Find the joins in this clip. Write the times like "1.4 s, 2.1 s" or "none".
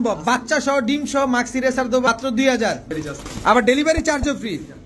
2.1 s, 3.0 s